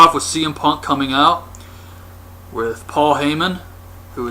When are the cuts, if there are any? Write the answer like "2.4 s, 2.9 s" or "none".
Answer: 2.6 s